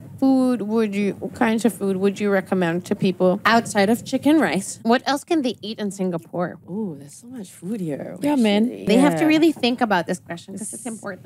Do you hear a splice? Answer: yes; 4 cuts; at 3.4 s, 4.7 s, 6.6 s, 8.9 s

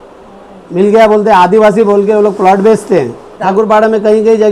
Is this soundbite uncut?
no; 1 cut; at 3.4 s

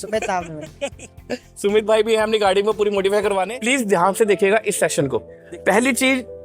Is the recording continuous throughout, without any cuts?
no; 2 cuts; at 3.5 s, 5.4 s

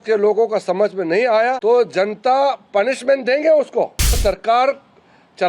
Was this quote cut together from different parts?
yes; 2 cuts; at 1.6 s, 4.2 s

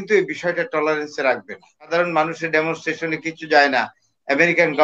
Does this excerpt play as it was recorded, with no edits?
no; 1 cut; at 1.9 s

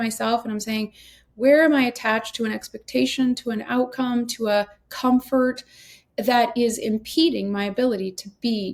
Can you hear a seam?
no; 0 cuts

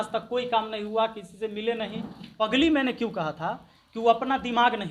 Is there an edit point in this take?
yes; 1 cut; at 2.3 s

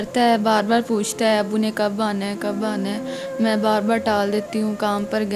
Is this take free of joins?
yes; 0 cuts

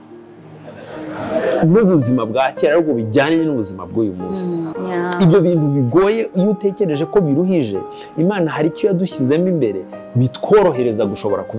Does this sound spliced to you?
yes; 1 cut; at 4.7 s

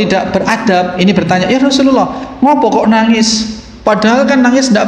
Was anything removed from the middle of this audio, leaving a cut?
no; 0 cuts

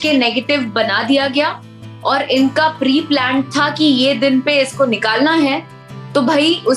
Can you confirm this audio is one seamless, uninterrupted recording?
yes; 0 cuts

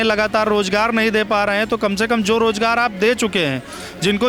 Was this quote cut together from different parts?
no; 0 cuts

